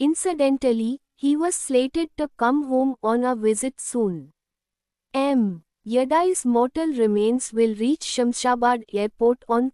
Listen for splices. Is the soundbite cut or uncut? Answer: cut